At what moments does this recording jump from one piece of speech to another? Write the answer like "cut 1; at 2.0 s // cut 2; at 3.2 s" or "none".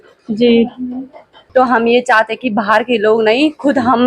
cut 1; at 1.3 s

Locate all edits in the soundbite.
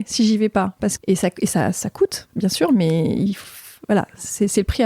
cut 1; at 1.0 s

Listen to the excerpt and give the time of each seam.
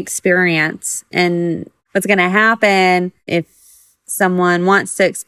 cut 1; at 1.7 s // cut 2; at 3.3 s

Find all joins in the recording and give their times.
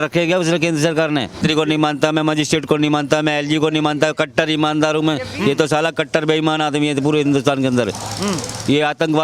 cut 1; at 1.3 s

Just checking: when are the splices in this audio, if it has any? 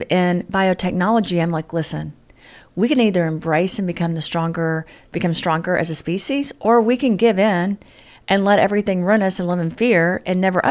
none

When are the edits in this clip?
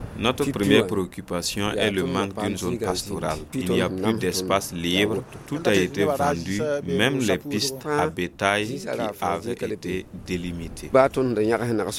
cut 1; at 3.5 s // cut 2; at 10.9 s

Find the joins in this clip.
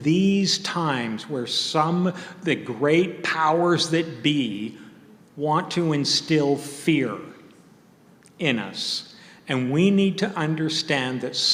none

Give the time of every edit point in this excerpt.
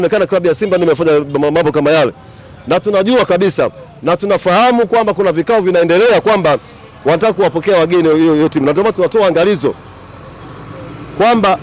none

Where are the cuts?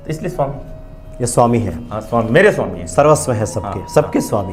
none

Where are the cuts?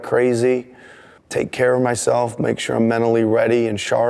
cut 1; at 1.1 s

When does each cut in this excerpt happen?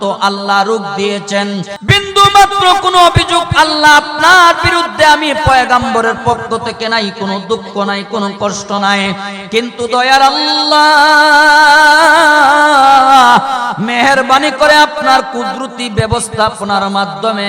cut 1; at 1.7 s

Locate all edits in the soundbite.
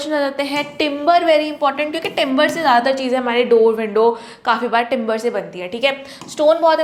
none

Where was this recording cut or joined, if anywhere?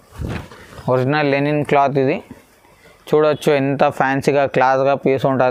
none

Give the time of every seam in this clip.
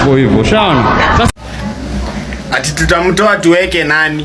none

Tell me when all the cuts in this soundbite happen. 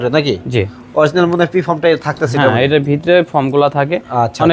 none

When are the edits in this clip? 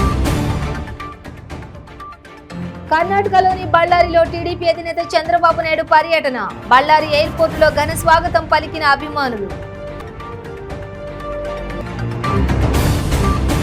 cut 1; at 2.8 s

